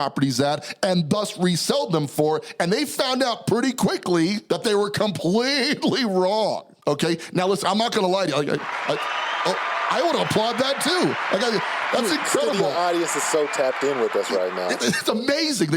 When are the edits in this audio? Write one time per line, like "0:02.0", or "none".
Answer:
0:04.4
0:06.7